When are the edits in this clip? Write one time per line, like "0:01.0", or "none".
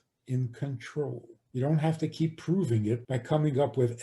0:01.3
0:03.1